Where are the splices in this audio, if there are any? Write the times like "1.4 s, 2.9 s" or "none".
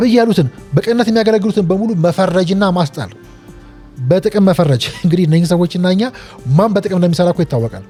none